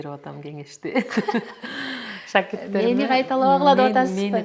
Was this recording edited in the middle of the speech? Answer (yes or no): no